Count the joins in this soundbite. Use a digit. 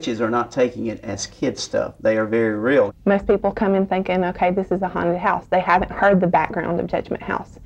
1